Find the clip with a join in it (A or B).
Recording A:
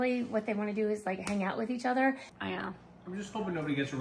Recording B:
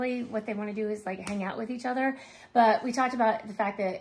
A